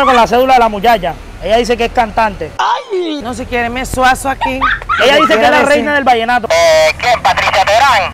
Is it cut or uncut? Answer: cut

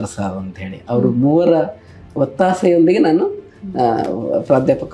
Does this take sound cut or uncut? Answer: uncut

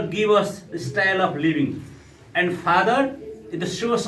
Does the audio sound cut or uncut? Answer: uncut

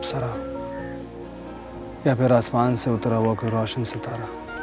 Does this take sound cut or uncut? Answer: cut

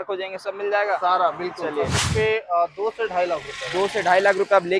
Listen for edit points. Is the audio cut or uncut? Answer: cut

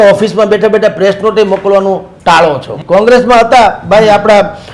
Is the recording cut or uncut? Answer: cut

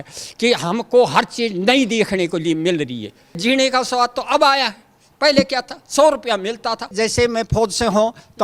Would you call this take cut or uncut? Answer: cut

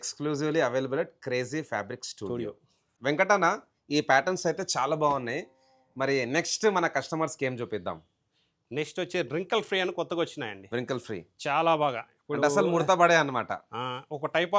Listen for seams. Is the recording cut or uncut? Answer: uncut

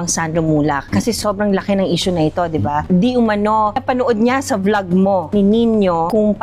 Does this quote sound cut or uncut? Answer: uncut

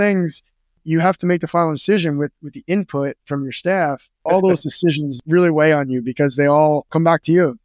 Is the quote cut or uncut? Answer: cut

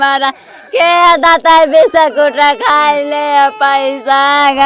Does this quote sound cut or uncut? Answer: uncut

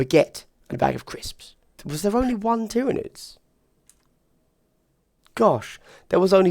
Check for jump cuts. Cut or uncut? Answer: cut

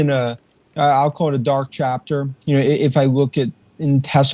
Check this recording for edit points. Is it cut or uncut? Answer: uncut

